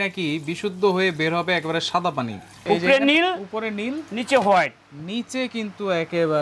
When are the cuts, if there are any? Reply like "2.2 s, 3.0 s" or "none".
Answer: 2.6 s